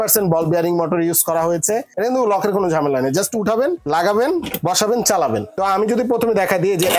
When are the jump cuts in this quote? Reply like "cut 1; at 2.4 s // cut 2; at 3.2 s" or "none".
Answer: cut 1; at 1.9 s // cut 2; at 3.8 s // cut 3; at 5.5 s

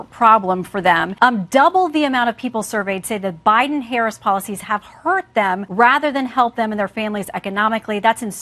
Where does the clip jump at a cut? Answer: cut 1; at 1.1 s // cut 2; at 5.7 s

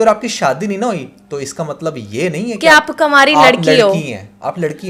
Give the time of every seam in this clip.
none

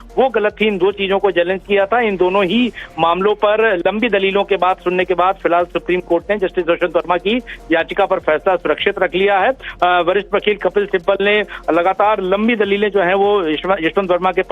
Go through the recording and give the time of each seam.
cut 1; at 11.4 s

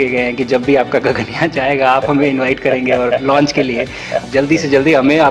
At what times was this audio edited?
cut 1; at 4.2 s

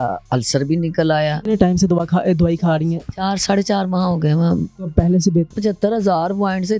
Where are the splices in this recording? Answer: cut 1; at 1.4 s // cut 2; at 4.7 s // cut 3; at 5.6 s

